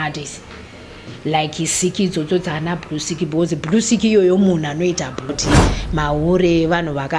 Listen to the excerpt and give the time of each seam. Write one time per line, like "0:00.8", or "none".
0:05.4